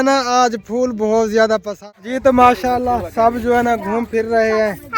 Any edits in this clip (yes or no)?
yes